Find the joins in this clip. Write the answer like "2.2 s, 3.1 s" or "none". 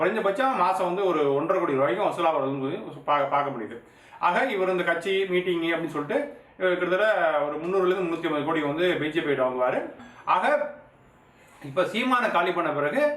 10.1 s